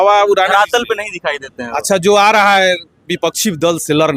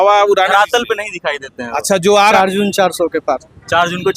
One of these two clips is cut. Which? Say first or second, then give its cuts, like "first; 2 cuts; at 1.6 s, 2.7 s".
second; 1 cut; at 2.3 s